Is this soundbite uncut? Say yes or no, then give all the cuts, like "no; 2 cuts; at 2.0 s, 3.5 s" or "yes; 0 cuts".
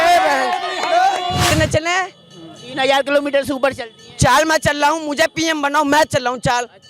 no; 1 cut; at 1.5 s